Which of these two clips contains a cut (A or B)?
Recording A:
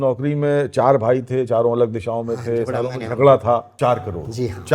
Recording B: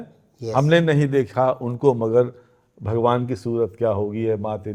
A